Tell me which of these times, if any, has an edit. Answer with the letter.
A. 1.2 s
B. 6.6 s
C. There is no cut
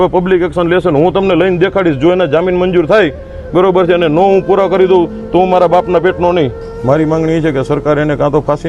B